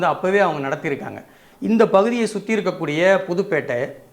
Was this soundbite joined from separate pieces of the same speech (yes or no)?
yes